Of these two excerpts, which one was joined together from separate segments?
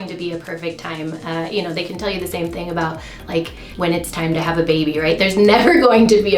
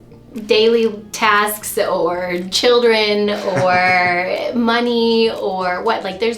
first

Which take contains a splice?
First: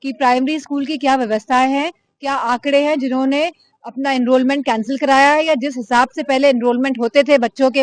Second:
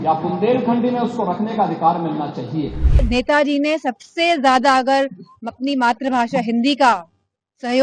second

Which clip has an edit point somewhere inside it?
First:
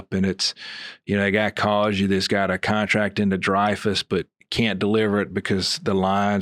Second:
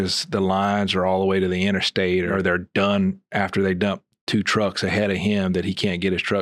second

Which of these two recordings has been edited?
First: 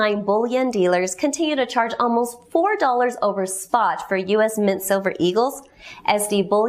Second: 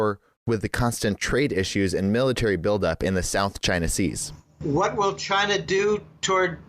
second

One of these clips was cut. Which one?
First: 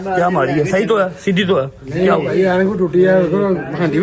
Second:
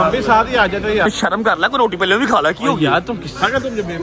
second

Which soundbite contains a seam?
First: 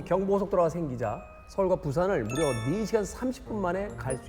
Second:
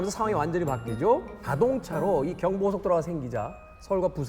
second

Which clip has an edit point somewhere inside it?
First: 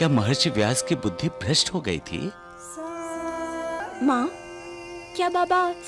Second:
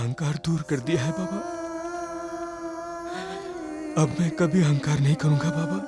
first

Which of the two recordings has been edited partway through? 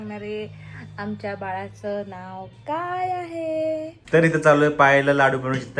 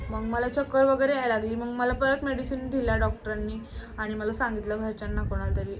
first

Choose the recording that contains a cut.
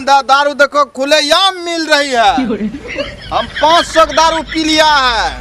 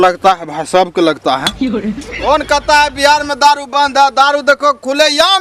second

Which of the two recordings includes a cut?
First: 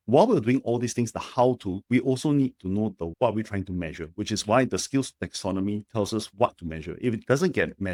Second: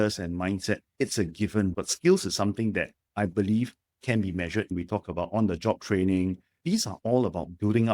second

